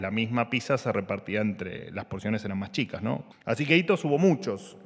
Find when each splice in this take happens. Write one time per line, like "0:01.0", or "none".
0:03.3